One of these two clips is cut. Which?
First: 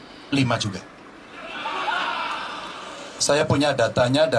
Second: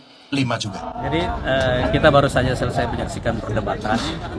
second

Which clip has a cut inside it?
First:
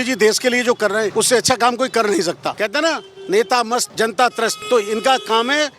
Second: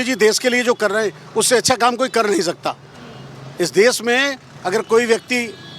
first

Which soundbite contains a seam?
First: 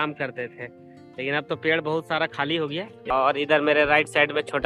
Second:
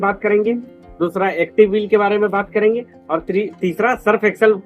first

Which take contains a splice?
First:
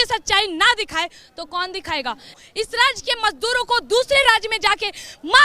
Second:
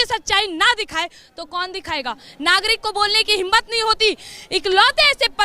first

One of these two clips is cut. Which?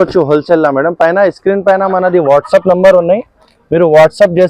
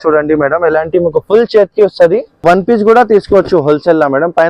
second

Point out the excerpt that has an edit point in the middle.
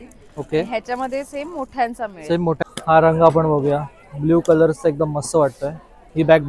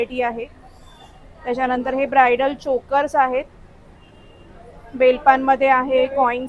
first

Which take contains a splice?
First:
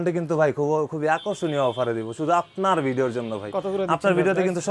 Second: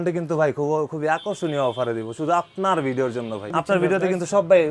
second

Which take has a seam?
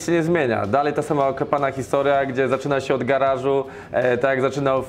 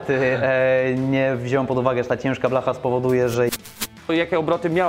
second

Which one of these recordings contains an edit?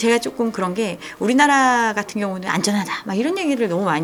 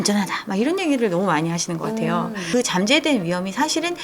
second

